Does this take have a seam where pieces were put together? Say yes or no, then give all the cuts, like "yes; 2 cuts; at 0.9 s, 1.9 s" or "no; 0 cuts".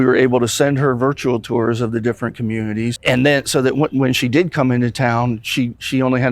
yes; 1 cut; at 2.9 s